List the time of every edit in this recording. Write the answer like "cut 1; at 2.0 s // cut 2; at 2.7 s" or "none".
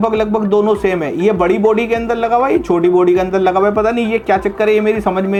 none